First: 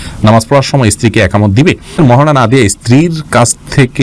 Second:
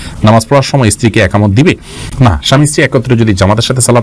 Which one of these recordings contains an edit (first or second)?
first